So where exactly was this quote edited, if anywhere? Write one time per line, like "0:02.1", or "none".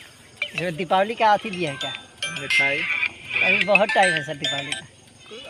none